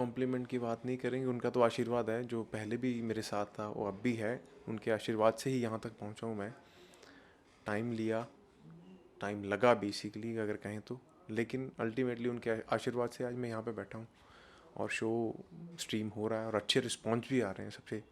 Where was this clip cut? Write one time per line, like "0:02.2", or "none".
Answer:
none